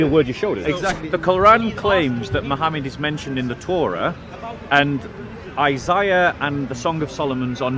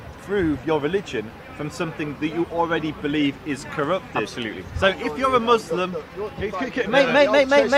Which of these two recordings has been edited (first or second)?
first